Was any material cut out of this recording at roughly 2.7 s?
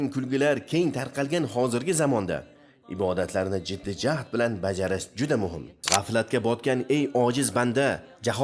no; 1 cut; at 5.7 s

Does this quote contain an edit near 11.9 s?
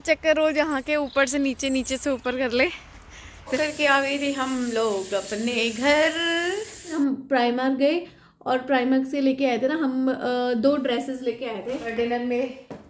yes; 3 cuts; at 3.6 s, 6.9 s, 11.9 s

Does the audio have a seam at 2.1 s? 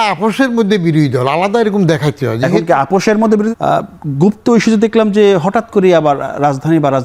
no; 1 cut; at 3.5 s

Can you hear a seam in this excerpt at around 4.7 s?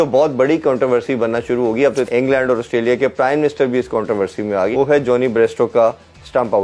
yes; 2 cuts; at 2.1 s, 4.7 s

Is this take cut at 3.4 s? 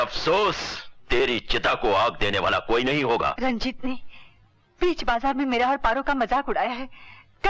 yes; 1 cut; at 3.4 s

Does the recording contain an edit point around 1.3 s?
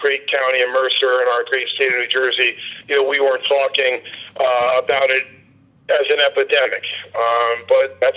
yes; 1 cut; at 1.3 s

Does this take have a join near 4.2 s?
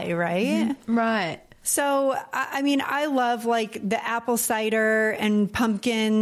no; 1 cut; at 1.3 s

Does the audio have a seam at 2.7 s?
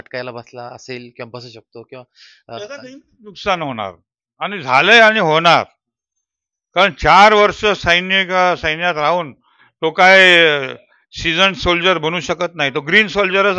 no; 0 cuts

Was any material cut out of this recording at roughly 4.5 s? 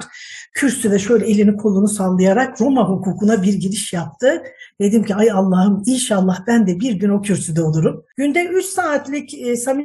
no; 1 cut; at 8.1 s

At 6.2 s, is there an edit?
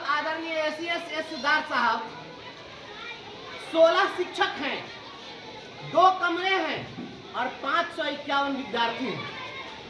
no; 0 cuts

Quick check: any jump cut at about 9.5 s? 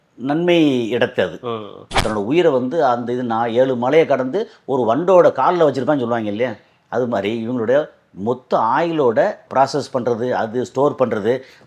no; 1 cut; at 1.9 s

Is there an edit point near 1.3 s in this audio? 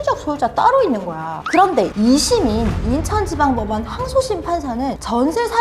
yes; 1 cut; at 1.3 s

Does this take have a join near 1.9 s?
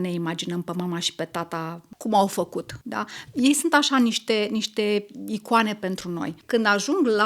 yes; 3 cuts; at 1.9 s, 2.8 s, 6.3 s

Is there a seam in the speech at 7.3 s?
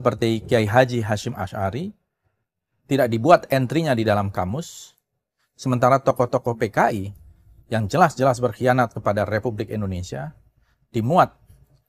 no; 0 cuts

